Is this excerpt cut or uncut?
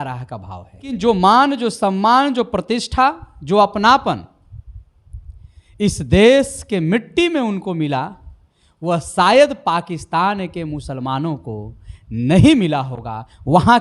cut